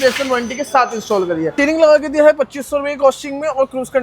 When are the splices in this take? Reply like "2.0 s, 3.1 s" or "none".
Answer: 1.5 s

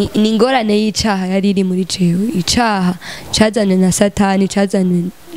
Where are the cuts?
none

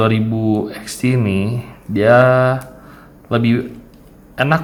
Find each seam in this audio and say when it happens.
none

